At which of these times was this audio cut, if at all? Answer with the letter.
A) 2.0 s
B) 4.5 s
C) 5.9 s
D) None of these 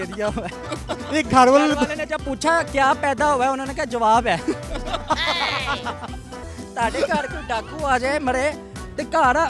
D